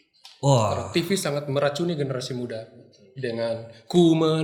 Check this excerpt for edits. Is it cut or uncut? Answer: uncut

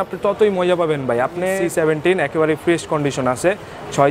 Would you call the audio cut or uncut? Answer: cut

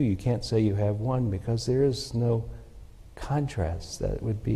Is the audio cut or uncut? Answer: uncut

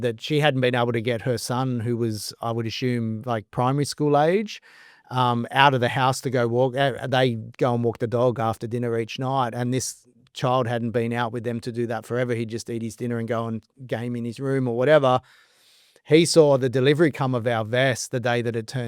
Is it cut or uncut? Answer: uncut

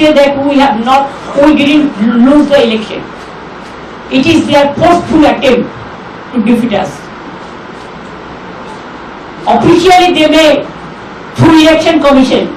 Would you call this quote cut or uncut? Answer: uncut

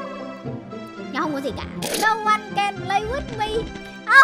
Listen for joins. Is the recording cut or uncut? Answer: cut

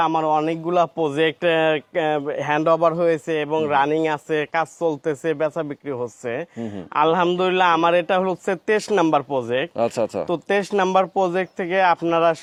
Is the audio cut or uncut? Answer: uncut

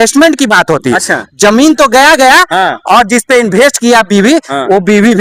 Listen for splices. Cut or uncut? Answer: uncut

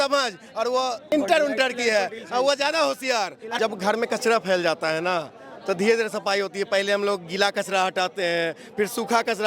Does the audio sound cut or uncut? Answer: cut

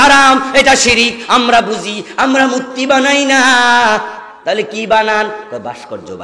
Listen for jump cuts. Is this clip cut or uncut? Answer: uncut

